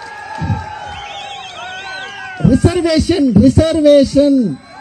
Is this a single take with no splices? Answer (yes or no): yes